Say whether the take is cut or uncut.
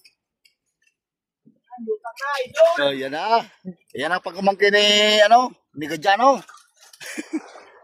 uncut